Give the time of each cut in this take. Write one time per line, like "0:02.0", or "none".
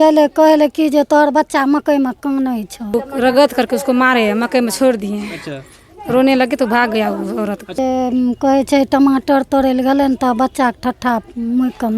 0:02.9
0:07.8